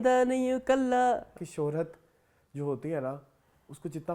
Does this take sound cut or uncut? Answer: cut